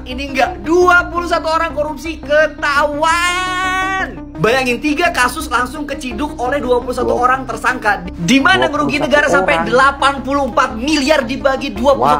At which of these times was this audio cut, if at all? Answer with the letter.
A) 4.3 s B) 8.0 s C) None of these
C